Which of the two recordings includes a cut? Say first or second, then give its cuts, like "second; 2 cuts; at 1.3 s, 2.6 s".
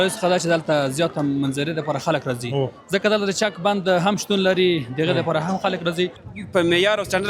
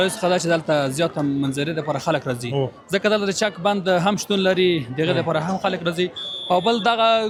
first; 1 cut; at 6.3 s